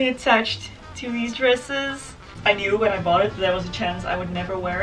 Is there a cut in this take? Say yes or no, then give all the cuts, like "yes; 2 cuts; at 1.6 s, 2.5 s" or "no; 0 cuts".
yes; 1 cut; at 2.3 s